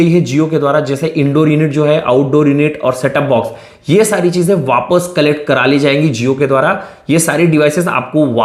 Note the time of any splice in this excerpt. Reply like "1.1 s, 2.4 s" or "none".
none

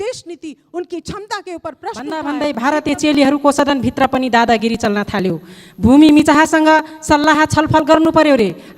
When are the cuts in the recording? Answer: 2.3 s

